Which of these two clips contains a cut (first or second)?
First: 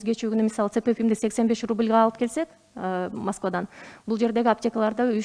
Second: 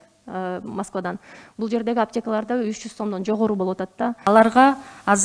second